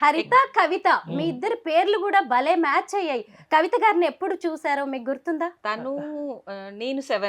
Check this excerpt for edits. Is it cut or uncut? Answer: cut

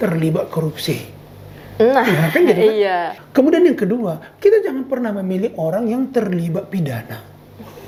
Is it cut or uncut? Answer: uncut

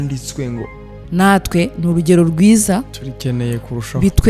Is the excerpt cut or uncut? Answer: cut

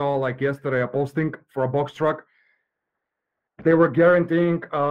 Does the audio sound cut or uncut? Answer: uncut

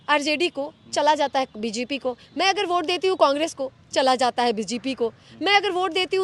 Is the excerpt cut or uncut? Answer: uncut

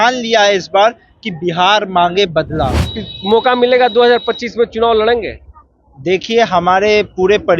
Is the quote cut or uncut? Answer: cut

